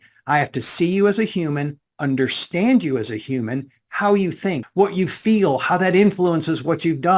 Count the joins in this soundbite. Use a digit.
1